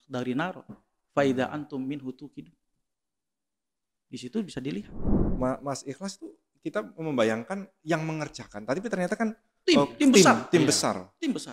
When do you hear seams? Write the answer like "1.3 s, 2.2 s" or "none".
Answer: 5.2 s